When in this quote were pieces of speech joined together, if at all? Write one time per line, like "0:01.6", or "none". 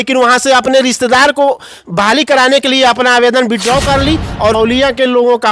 0:04.5